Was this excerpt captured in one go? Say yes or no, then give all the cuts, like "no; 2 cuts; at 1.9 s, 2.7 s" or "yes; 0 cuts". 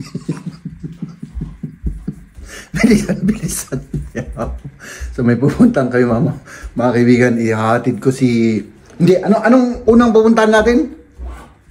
yes; 0 cuts